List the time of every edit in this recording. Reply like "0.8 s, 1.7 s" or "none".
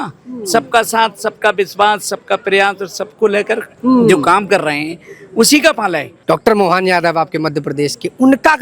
3.7 s, 6.1 s